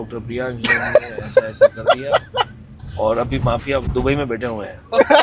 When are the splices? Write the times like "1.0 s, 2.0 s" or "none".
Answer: none

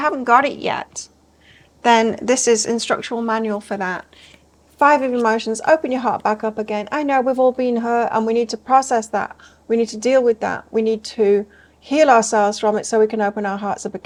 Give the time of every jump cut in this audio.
none

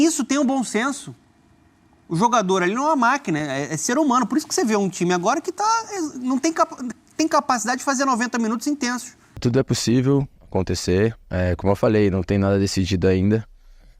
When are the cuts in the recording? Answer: 9.4 s

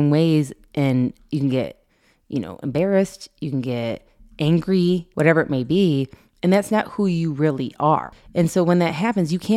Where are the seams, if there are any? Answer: 5.1 s, 8.2 s

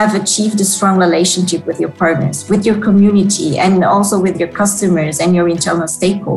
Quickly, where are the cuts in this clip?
none

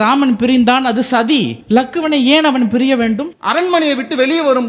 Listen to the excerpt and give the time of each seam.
3.3 s

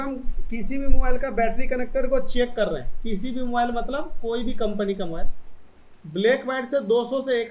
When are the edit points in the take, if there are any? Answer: none

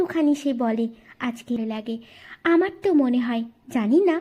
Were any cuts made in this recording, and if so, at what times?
1.6 s

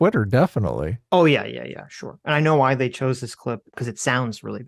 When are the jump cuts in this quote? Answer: 3.8 s

